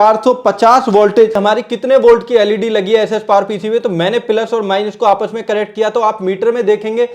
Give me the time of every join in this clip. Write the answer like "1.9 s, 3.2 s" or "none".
1.4 s